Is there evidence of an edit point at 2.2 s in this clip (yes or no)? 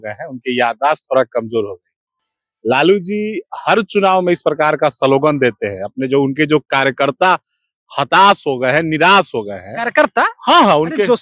no